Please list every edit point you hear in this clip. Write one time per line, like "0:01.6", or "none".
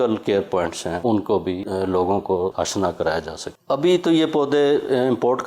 0:01.0
0:01.6
0:02.5
0:03.5